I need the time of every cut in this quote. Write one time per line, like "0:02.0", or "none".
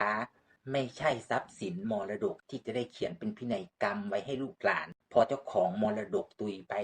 0:02.4
0:04.9